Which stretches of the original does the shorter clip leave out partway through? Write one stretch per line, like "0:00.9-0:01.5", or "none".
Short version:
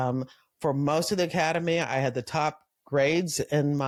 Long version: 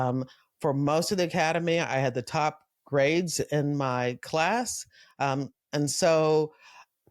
none